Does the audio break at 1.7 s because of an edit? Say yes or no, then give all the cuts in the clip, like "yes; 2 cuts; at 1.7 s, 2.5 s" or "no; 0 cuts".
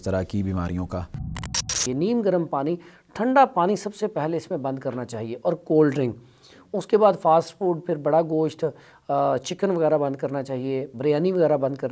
yes; 1 cut; at 1.7 s